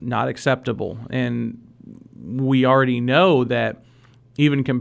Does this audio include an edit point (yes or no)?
no